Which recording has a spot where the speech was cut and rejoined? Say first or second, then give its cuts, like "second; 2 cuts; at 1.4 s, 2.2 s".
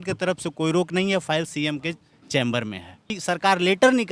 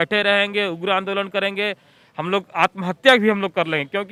first; 1 cut; at 3.2 s